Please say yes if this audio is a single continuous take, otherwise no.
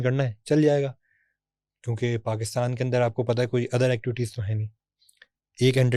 yes